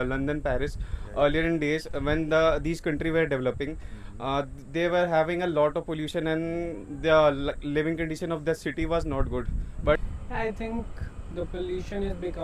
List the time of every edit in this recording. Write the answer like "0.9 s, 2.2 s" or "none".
10.0 s